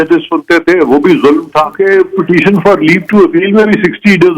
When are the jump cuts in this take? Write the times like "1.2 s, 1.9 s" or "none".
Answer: 1.7 s